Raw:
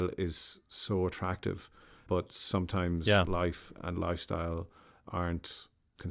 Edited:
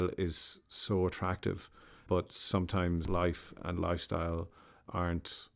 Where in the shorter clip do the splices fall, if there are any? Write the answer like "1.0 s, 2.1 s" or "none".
3.1 s